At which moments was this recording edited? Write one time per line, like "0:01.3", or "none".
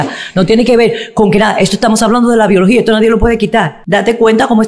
0:03.8